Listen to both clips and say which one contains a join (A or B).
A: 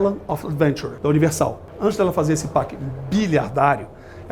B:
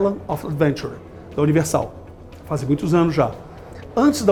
A